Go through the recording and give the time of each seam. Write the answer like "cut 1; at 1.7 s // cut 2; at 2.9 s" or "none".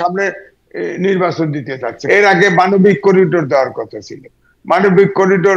cut 1; at 2.0 s